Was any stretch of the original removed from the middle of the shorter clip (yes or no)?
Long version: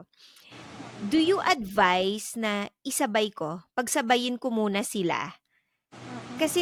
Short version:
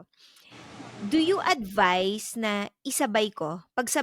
no